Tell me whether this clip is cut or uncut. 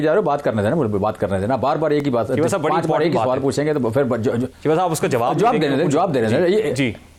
uncut